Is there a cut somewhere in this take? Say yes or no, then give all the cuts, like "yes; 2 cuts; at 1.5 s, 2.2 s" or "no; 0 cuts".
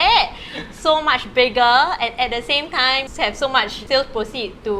yes; 1 cut; at 3.3 s